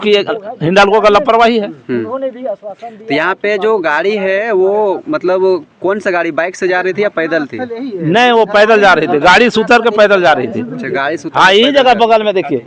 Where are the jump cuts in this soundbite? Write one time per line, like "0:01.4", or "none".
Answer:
none